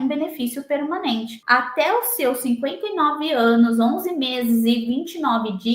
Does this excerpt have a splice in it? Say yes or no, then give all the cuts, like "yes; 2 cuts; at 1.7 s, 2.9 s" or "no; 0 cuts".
no; 0 cuts